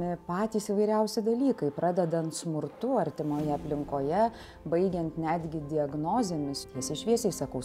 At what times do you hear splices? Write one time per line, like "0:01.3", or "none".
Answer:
0:06.6